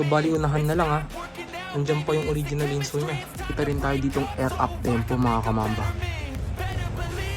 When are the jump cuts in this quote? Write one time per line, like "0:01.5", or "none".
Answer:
0:03.4